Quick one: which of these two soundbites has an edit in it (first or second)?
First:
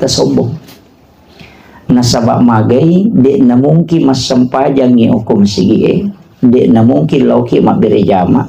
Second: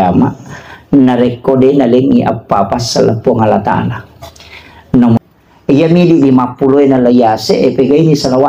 second